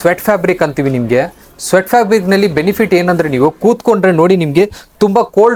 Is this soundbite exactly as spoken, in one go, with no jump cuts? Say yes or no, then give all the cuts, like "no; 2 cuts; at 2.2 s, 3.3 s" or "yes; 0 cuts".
yes; 0 cuts